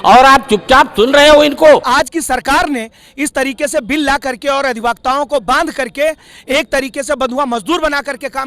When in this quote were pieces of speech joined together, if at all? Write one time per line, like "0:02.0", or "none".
0:01.9